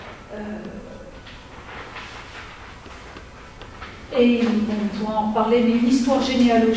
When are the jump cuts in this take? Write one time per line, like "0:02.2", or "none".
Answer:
none